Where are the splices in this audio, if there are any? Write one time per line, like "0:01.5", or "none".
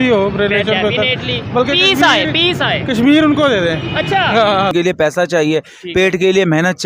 0:04.7